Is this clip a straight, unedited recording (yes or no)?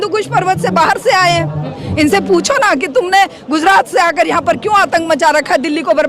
no